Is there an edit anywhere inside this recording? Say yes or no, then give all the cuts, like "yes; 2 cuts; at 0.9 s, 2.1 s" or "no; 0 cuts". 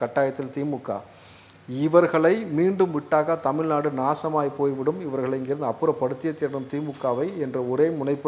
no; 0 cuts